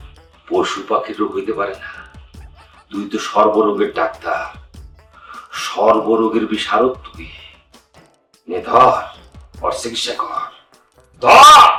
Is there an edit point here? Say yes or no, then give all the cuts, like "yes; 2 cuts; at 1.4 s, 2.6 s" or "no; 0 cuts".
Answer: no; 0 cuts